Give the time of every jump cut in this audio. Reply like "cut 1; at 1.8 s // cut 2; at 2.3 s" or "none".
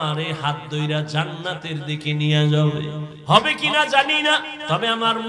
cut 1; at 3.1 s